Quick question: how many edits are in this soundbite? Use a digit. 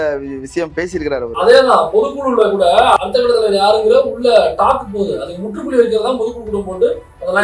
0